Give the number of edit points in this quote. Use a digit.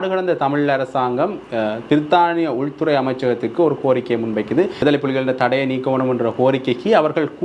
1